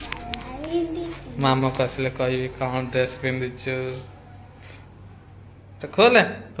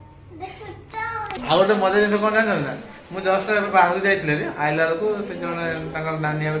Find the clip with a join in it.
second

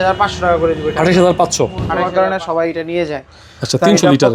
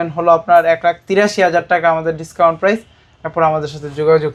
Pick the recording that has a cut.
first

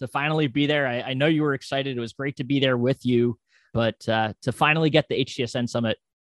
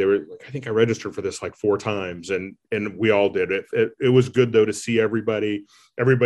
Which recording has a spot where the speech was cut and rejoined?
first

